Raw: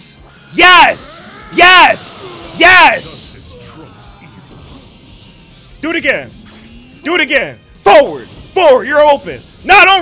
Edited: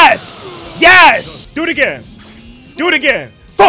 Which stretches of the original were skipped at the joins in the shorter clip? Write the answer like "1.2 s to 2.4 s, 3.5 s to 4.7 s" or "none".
3.2 s to 5.6 s